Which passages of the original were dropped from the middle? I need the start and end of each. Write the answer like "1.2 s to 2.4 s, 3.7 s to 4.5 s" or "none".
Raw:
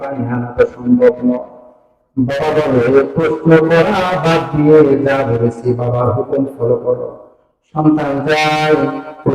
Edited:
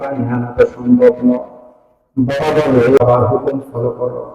3.0 s to 5.8 s